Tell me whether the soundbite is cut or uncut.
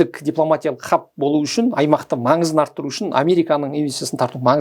uncut